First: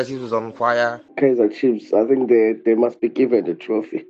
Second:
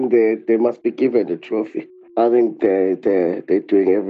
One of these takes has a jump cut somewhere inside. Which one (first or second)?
first